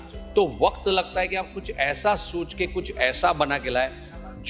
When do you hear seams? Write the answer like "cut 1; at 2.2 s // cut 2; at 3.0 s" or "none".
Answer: none